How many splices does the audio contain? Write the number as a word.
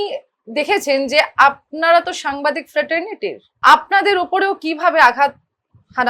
one